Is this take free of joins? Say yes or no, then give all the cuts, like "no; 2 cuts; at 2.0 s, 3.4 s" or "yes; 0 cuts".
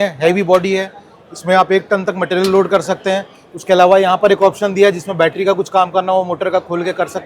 yes; 0 cuts